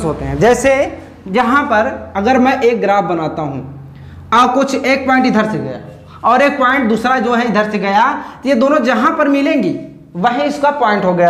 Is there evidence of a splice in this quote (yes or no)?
no